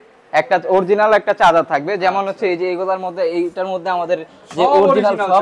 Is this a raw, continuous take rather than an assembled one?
yes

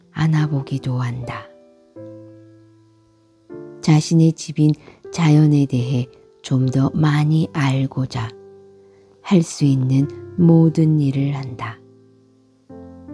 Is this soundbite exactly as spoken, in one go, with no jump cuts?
yes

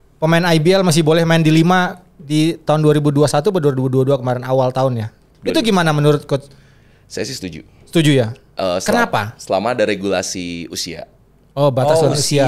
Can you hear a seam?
yes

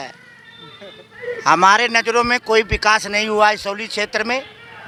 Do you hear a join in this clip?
no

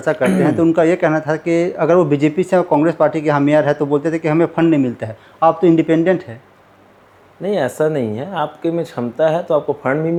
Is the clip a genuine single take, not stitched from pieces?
yes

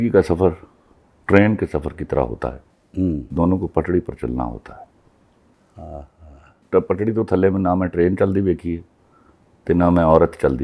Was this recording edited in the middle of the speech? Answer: yes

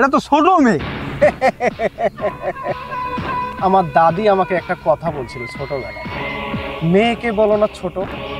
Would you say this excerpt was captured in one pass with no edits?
yes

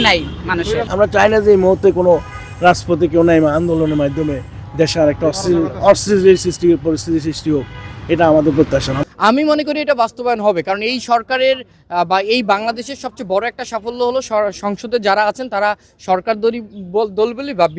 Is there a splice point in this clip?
yes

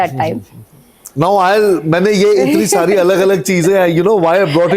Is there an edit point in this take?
yes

